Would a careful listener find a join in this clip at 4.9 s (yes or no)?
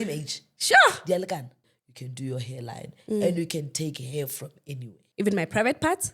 yes